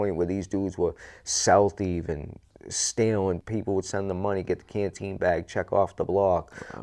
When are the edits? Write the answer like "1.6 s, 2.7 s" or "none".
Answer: 2.4 s, 3.4 s